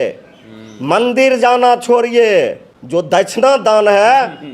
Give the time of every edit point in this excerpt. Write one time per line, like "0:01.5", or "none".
0:03.2